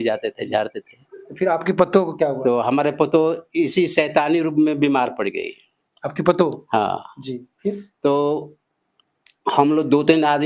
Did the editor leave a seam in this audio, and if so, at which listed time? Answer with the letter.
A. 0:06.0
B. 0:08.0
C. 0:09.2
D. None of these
D